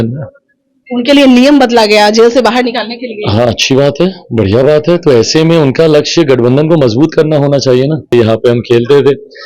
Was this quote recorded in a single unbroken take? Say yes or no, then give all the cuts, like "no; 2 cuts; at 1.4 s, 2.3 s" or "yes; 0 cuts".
no; 1 cut; at 8.1 s